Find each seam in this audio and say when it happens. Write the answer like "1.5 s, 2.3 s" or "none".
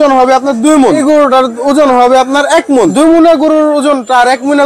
1.0 s, 2.9 s